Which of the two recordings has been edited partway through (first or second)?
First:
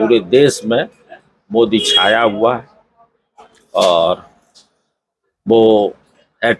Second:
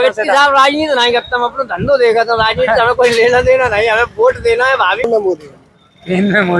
second